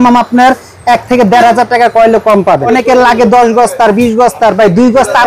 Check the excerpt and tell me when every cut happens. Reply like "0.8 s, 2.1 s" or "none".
2.7 s